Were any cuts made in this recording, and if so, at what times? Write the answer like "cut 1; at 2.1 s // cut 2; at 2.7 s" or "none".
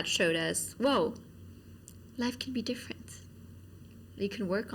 none